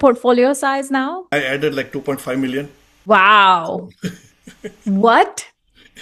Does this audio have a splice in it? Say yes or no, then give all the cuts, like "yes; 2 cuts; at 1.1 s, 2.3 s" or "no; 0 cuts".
yes; 2 cuts; at 1.3 s, 3.1 s